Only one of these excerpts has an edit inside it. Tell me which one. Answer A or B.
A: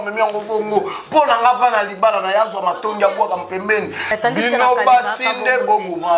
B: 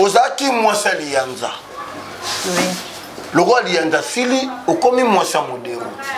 A